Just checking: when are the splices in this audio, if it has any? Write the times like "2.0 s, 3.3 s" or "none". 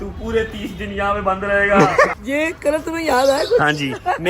2.2 s